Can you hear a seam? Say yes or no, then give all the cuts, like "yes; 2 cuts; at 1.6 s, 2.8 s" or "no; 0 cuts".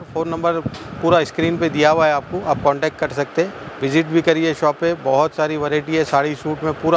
no; 0 cuts